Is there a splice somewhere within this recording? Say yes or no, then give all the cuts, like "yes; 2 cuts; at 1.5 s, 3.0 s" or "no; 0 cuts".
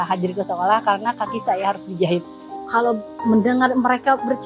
yes; 1 cut; at 2.7 s